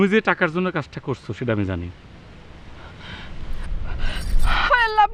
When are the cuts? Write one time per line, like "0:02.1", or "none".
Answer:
none